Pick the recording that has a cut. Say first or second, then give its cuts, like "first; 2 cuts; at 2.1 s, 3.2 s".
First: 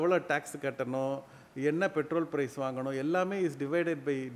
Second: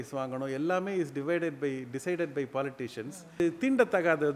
second; 1 cut; at 3.4 s